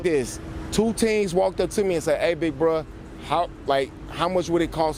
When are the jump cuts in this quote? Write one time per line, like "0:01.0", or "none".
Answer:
none